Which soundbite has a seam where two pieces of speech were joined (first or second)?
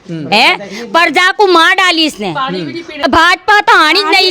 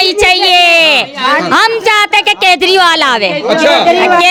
first